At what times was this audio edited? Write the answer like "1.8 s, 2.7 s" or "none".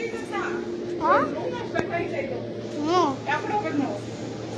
none